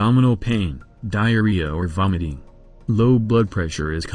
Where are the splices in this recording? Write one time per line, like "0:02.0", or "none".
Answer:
0:01.1